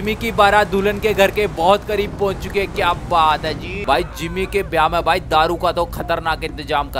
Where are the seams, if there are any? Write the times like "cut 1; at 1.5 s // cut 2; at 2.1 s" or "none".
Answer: cut 1; at 3.7 s